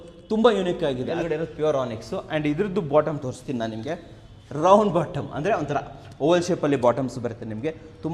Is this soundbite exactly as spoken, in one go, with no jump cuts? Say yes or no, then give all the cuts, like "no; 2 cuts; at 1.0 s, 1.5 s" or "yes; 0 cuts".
no; 1 cut; at 1.0 s